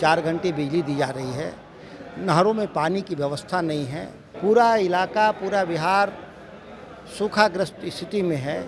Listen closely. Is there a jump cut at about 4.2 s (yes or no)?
yes